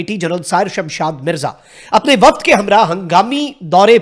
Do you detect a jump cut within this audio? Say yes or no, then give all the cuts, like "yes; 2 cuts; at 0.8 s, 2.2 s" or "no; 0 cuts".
no; 0 cuts